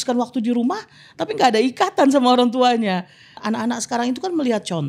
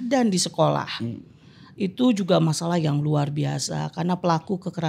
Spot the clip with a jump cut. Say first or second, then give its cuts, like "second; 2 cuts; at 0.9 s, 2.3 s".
first; 1 cut; at 3.4 s